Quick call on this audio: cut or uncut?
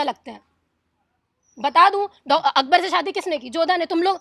uncut